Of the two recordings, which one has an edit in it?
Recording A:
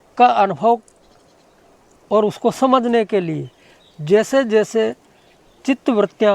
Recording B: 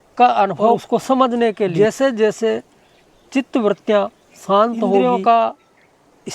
B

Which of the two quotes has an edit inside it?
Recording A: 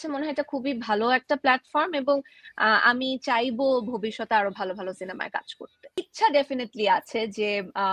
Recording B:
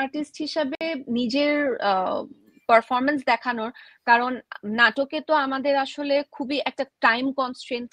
A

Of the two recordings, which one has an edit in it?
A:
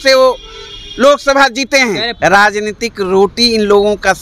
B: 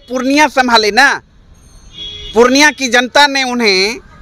A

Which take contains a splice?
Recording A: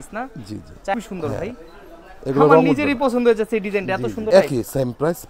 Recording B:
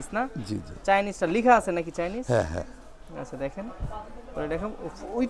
A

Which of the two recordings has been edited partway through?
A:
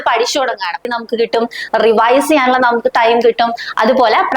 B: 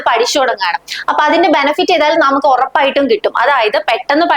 A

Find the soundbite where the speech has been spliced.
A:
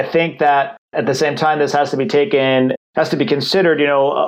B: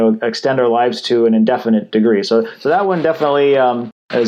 A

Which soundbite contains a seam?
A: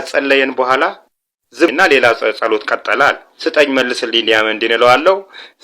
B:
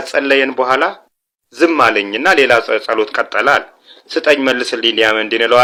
A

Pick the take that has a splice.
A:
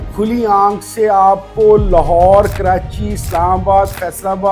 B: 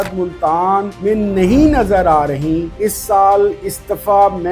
B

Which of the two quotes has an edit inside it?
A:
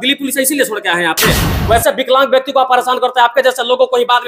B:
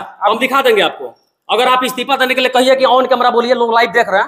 A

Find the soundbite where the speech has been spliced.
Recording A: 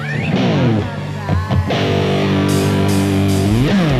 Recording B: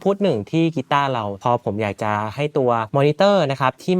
B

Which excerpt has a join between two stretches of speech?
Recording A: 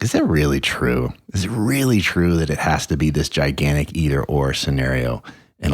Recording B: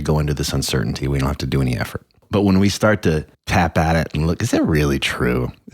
B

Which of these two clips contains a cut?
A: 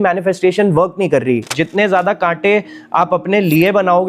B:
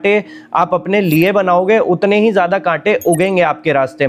A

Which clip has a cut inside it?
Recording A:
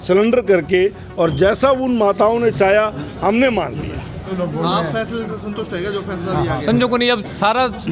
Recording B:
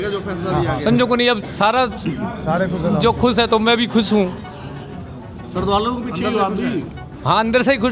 A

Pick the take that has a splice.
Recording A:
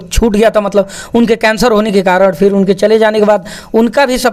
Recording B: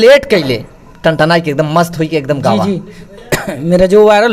B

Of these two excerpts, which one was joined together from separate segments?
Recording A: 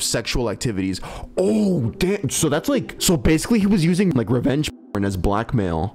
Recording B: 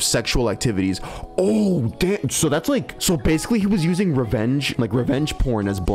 A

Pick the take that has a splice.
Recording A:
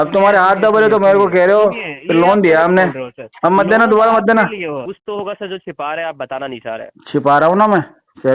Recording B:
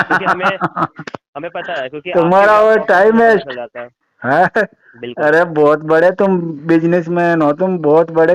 A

